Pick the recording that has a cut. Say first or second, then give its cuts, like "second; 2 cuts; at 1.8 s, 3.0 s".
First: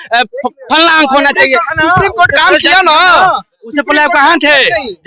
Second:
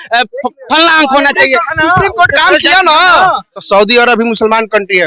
second; 1 cut; at 3.5 s